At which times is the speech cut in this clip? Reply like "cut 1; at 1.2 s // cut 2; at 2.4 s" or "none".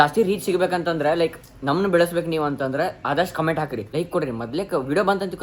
cut 1; at 3.9 s